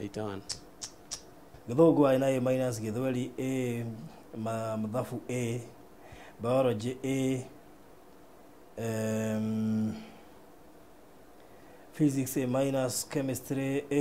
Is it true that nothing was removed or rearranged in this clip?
no; 1 cut; at 1.5 s

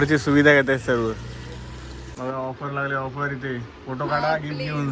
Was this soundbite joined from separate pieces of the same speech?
yes; 1 cut; at 2.0 s

